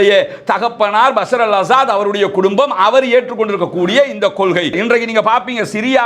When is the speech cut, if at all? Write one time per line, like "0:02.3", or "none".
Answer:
0:04.8